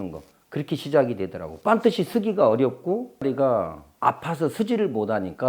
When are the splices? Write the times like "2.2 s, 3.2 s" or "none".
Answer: 3.2 s